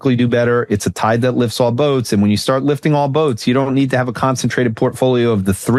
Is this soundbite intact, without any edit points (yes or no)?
yes